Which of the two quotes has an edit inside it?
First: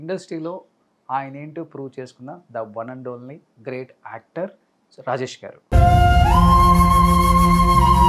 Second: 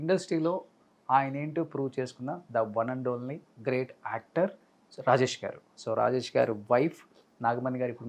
second; 1 cut; at 5.8 s

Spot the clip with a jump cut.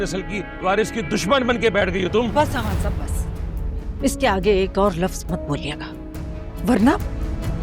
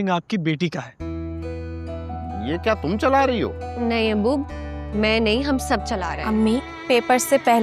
second; 1 cut; at 6.2 s

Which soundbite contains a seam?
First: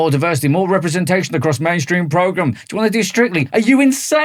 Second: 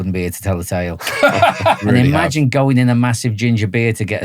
second; 1 cut; at 1.8 s

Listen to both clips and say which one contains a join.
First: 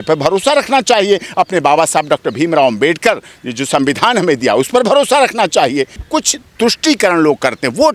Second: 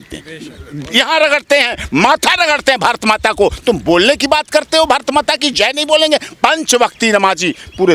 first; 1 cut; at 6.0 s

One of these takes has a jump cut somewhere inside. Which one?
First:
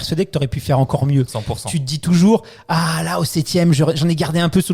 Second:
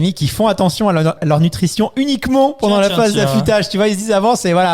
second; 1 cut; at 1.2 s

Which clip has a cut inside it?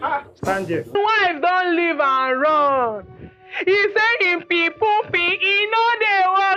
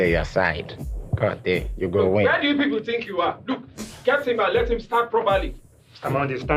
first; 1 cut; at 1.0 s

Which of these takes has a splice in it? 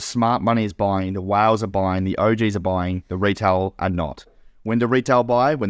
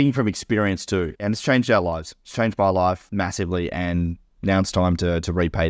second; 2 cuts; at 1.1 s, 3.0 s

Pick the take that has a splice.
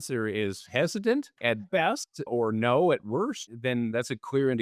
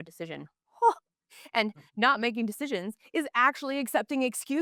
first; 2 cuts; at 1.3 s, 3.9 s

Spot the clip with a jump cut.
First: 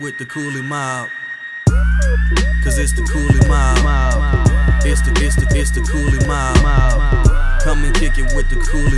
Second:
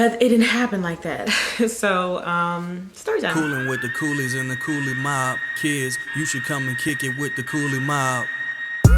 second; 1 cut; at 3.3 s

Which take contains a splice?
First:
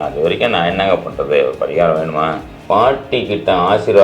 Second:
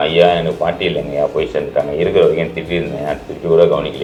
first; 1 cut; at 2.5 s

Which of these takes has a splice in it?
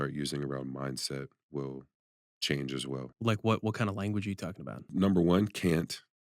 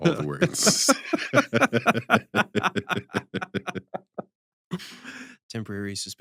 first; 2 cuts; at 3.1 s, 4.9 s

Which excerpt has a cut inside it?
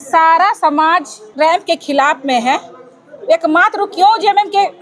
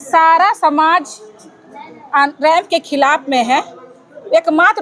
first; 1 cut; at 1.3 s

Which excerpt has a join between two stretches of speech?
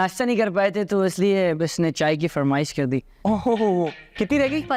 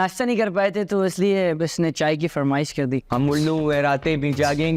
second; 1 cut; at 3.1 s

